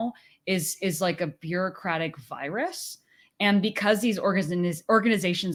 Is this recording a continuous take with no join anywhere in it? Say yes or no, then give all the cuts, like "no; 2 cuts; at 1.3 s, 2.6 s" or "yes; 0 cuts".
yes; 0 cuts